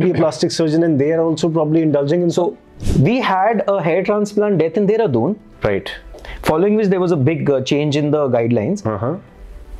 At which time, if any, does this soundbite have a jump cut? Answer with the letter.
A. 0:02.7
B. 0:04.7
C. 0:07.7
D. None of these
A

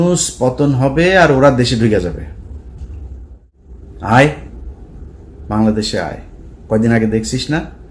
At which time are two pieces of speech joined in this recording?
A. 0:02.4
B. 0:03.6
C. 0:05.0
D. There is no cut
B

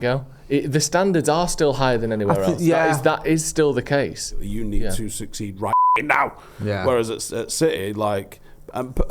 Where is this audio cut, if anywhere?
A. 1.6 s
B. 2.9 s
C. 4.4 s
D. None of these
C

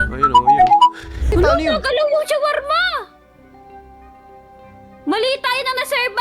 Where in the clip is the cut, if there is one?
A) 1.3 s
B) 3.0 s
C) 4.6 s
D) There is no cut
A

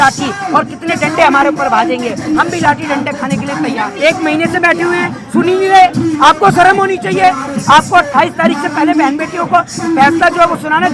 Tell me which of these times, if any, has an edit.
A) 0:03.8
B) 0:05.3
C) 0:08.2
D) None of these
A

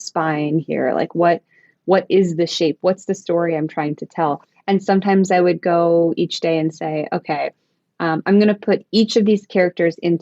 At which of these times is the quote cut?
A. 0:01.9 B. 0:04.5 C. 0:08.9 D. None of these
B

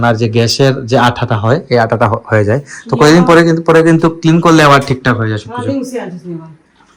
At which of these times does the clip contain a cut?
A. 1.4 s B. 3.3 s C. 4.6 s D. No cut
D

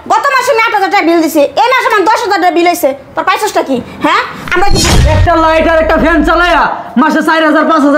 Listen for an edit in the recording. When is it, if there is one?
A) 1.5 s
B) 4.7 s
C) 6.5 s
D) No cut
B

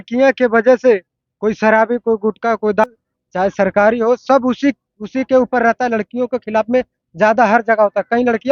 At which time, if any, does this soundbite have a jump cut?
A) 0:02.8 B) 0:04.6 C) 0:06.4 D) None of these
A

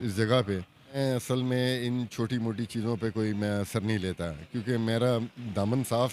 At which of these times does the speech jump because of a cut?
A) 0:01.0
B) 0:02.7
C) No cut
A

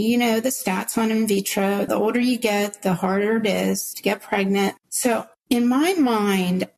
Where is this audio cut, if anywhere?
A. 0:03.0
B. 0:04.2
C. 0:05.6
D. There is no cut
D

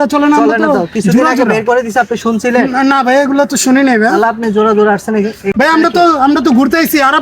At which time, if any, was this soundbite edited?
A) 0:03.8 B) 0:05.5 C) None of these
B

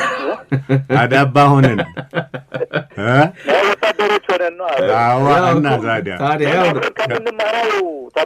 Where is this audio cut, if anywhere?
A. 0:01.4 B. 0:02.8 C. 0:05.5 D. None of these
B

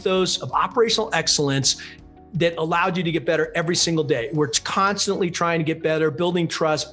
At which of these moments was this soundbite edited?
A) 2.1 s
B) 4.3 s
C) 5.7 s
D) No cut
D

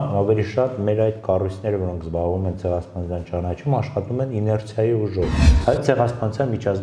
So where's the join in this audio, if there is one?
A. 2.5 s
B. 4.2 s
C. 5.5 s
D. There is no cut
C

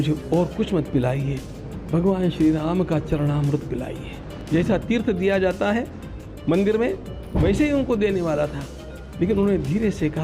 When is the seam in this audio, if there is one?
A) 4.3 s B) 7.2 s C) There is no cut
A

